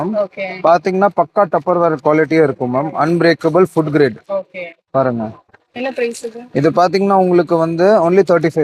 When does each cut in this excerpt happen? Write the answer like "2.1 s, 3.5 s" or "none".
none